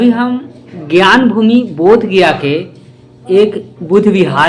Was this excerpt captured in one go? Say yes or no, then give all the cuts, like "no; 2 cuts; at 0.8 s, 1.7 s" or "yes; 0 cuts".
yes; 0 cuts